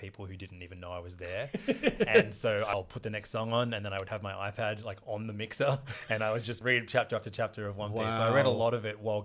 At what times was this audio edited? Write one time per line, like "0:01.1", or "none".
0:02.7
0:06.6